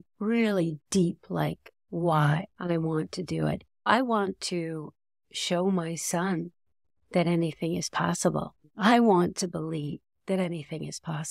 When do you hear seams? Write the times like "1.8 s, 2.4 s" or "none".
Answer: 2.5 s, 3.8 s, 8.6 s